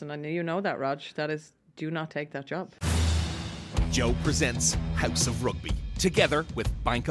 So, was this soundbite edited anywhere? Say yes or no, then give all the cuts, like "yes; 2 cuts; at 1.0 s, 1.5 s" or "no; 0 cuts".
yes; 1 cut; at 2.7 s